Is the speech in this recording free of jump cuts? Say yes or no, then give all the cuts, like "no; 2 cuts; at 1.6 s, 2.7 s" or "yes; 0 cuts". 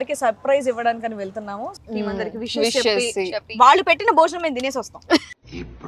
no; 1 cut; at 1.7 s